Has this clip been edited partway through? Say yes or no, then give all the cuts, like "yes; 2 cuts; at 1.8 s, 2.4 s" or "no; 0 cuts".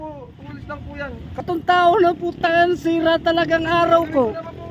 yes; 1 cut; at 1.4 s